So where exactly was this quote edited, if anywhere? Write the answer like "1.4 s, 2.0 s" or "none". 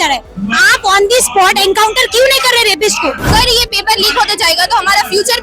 3.3 s